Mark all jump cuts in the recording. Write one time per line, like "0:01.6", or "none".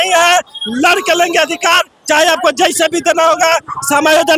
none